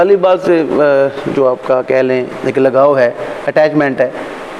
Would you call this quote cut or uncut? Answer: uncut